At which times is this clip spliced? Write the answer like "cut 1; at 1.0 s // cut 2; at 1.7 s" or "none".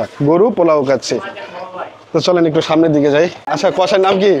cut 1; at 3.4 s